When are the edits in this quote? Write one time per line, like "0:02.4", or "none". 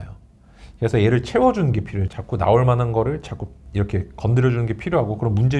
0:02.0